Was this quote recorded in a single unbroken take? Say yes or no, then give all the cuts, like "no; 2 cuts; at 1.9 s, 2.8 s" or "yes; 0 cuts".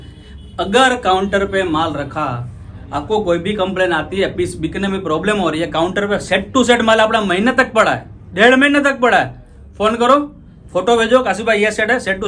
yes; 0 cuts